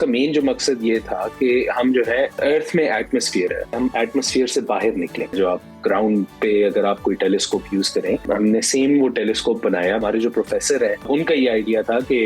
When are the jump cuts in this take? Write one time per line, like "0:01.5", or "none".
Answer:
0:02.3
0:03.8
0:05.4
0:08.2
0:10.0
0:11.1